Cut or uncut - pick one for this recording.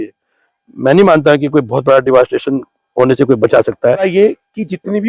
cut